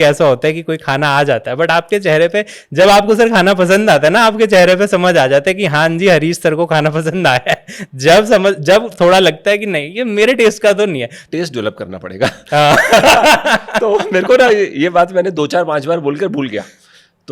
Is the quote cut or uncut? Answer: cut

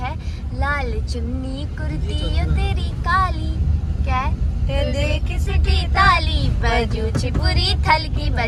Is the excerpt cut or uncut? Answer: uncut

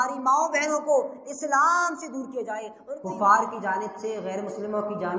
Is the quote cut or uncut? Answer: cut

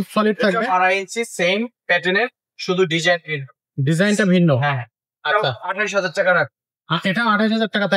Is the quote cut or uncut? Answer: uncut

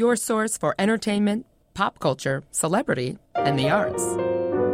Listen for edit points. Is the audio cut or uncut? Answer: uncut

